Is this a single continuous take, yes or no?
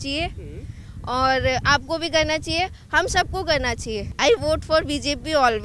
no